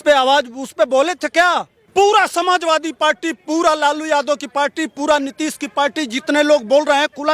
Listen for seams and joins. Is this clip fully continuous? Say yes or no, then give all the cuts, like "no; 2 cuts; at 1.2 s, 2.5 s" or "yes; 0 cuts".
no; 1 cut; at 1.8 s